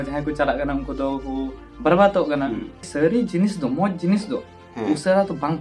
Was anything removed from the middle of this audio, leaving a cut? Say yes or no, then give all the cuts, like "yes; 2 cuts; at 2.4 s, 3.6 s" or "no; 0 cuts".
yes; 1 cut; at 2.8 s